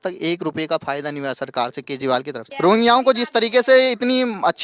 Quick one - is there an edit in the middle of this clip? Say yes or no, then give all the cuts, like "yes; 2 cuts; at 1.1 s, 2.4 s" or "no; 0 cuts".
yes; 1 cut; at 2.4 s